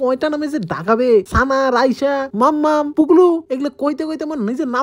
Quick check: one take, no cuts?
no; 3 cuts; at 1.3 s, 2.3 s, 3.4 s

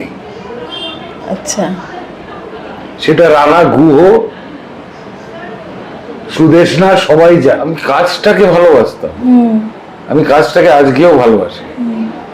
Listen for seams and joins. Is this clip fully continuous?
no; 1 cut; at 7.8 s

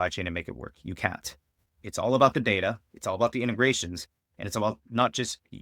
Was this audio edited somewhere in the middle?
yes; 1 cut; at 1.8 s

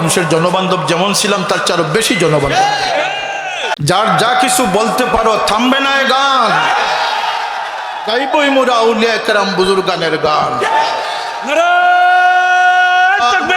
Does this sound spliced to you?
yes; 1 cut; at 3.7 s

